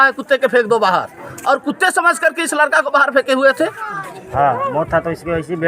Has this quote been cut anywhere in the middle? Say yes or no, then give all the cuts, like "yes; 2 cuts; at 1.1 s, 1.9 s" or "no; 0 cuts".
yes; 1 cut; at 3.9 s